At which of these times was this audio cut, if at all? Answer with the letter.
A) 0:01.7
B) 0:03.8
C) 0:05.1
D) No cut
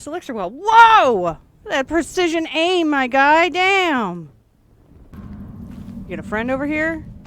C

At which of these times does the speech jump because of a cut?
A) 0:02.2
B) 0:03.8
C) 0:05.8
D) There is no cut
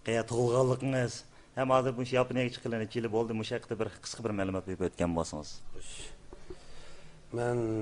C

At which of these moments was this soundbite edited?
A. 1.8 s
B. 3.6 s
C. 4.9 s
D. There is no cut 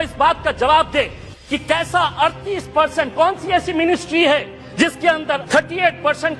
C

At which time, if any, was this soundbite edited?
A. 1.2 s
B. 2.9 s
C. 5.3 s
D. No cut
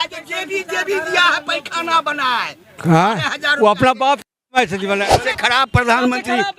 C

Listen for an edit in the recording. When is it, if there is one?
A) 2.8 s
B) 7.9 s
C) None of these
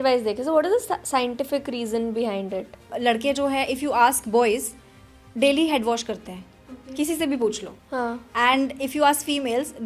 A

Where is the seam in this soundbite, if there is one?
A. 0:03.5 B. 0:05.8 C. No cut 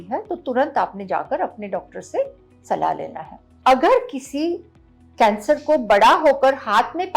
A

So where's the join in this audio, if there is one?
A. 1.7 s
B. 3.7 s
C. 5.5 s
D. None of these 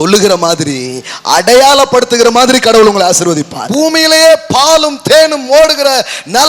B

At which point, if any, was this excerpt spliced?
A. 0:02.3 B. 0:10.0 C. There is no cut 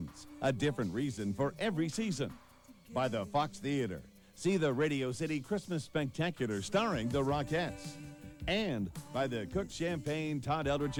C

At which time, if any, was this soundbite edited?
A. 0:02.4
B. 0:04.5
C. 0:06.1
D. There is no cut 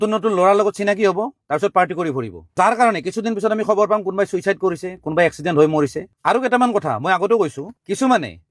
D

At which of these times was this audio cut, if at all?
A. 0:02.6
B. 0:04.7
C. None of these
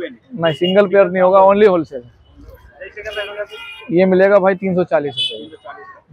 C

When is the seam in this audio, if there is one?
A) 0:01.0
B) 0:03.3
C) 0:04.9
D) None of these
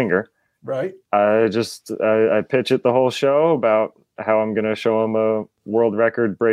A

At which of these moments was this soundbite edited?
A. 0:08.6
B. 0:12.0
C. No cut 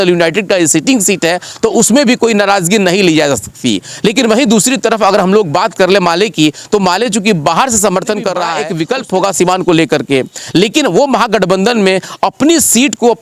A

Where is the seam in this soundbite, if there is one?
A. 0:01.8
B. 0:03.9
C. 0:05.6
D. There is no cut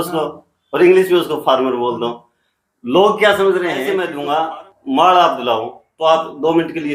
B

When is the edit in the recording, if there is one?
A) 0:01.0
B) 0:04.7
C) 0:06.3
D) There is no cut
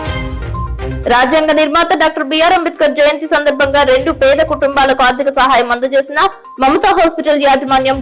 A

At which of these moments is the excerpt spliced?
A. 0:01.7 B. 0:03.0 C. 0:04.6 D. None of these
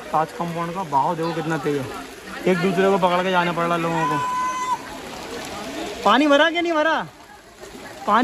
D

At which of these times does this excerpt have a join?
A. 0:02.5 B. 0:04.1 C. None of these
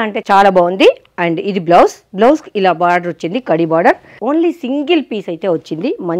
B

